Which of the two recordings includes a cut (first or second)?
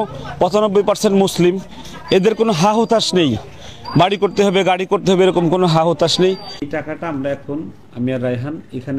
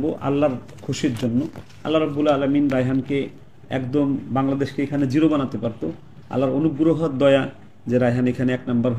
first